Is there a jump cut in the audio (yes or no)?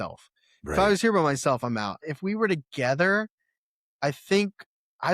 yes